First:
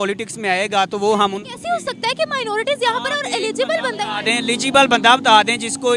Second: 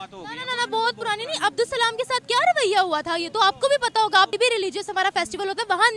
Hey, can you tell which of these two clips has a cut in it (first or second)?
second